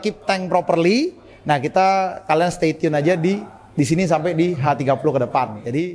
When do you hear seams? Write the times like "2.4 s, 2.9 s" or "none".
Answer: none